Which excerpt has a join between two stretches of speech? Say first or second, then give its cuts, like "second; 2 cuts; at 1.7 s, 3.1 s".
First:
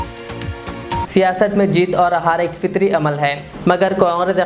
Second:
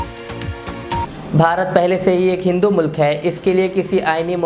first; 1 cut; at 1.0 s